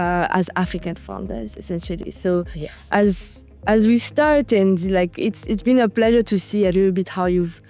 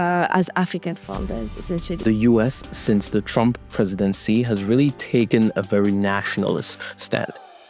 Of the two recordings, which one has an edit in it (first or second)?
second